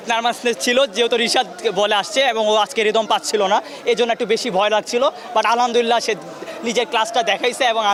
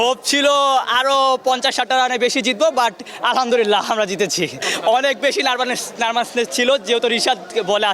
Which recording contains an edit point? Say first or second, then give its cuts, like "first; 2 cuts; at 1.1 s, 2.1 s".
second; 1 cut; at 4.6 s